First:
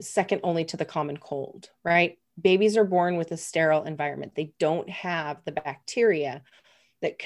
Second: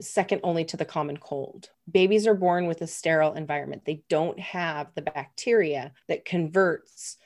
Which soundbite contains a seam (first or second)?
second